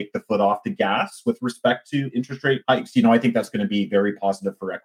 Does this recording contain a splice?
yes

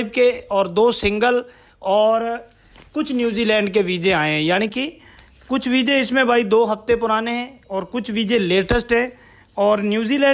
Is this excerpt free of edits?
yes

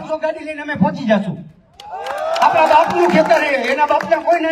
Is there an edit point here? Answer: no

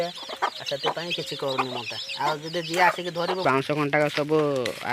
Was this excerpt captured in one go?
no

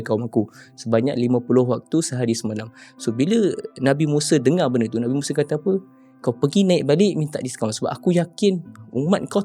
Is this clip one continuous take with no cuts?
yes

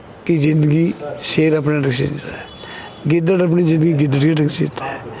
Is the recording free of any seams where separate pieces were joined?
yes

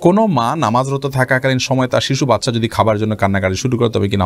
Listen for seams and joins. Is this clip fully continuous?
yes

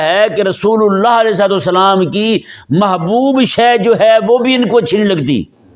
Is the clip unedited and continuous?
yes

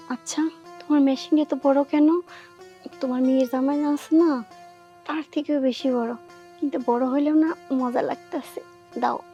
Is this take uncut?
yes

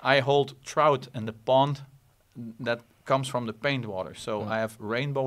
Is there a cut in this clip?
no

